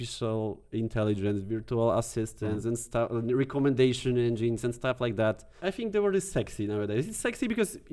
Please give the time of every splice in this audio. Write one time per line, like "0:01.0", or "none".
0:05.5